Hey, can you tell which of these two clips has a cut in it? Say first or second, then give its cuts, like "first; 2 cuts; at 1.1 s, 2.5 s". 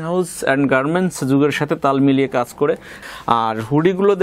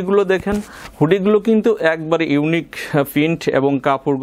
first; 1 cut; at 2.9 s